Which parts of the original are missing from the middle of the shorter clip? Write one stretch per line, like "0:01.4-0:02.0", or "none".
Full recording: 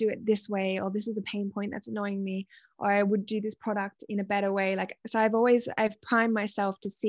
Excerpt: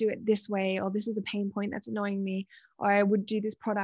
none